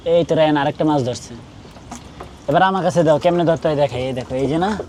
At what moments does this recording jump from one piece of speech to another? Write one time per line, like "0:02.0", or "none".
none